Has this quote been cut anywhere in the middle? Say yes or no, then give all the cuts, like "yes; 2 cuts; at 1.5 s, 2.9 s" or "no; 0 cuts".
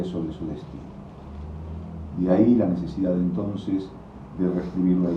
yes; 1 cut; at 1.3 s